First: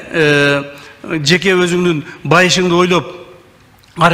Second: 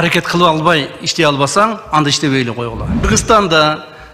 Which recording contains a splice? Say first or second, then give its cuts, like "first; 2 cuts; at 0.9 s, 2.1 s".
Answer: second; 1 cut; at 3.1 s